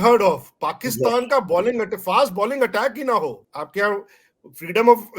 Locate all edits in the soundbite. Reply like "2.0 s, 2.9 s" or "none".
3.5 s